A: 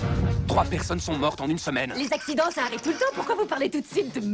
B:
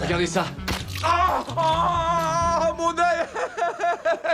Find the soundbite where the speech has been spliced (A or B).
B